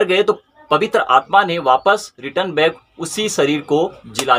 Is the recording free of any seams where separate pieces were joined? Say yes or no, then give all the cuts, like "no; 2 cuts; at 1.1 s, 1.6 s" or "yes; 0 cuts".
yes; 0 cuts